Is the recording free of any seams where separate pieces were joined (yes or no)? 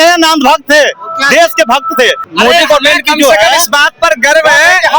no